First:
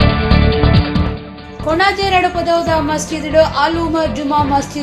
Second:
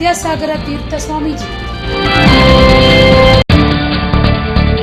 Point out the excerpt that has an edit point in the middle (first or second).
first